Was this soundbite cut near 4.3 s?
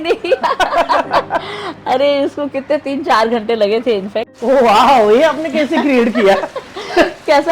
yes; 1 cut; at 4.3 s

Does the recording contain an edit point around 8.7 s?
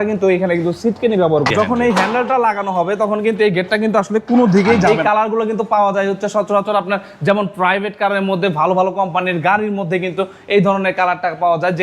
no; 2 cuts; at 1.5 s, 4.9 s

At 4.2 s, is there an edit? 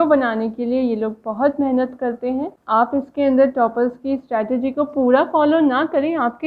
no; 1 cut; at 2.6 s

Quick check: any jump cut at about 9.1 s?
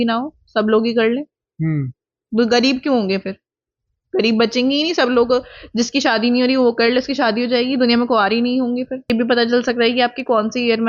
yes; 1 cut; at 9.1 s

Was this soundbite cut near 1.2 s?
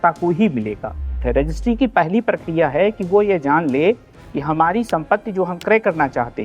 yes; 1 cut; at 1.2 s

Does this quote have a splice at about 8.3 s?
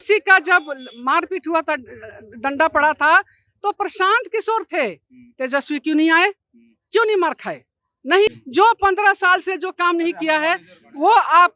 yes; 1 cut; at 8.3 s

